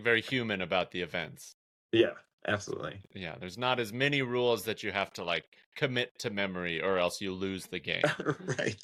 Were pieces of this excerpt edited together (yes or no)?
no